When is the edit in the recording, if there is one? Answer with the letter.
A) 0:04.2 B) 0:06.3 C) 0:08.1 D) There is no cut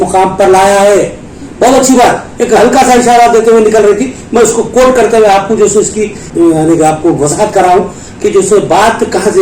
B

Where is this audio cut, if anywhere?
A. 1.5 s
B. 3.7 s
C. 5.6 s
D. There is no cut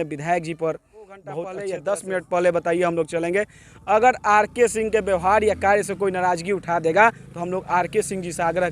A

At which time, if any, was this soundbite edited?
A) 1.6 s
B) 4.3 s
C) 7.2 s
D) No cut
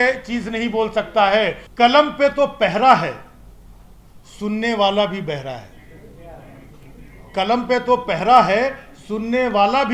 A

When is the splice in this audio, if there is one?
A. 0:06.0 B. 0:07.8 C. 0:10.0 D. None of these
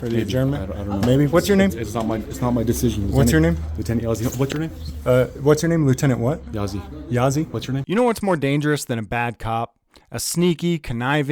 B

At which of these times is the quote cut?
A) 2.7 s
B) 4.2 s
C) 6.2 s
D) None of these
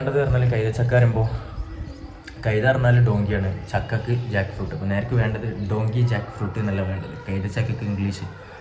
D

